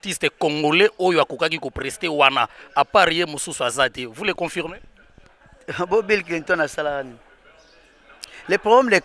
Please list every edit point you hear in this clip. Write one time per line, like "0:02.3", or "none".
none